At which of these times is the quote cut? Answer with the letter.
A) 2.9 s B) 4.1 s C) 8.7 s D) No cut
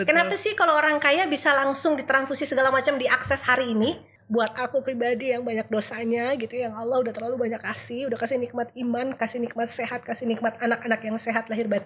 B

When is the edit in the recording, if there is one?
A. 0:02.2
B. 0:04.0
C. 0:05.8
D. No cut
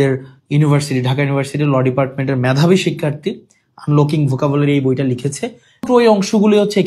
C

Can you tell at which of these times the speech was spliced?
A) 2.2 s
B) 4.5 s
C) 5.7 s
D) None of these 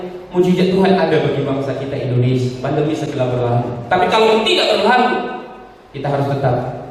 D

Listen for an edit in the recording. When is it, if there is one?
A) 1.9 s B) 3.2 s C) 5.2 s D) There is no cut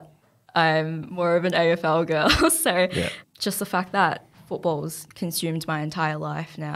B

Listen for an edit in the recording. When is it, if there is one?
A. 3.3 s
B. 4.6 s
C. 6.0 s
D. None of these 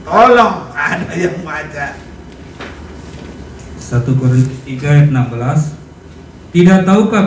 A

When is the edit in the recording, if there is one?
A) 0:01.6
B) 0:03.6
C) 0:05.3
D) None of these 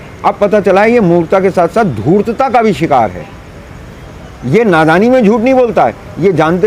D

